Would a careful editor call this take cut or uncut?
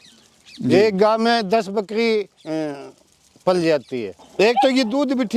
cut